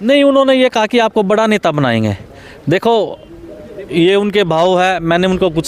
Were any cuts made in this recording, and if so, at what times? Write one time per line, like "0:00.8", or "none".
none